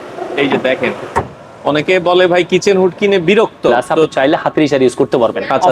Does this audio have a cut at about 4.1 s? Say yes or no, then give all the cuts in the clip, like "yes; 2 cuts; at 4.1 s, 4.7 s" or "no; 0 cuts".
yes; 1 cut; at 4.1 s